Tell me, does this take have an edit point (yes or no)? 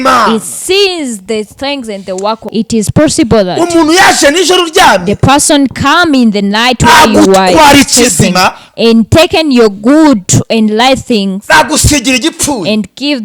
yes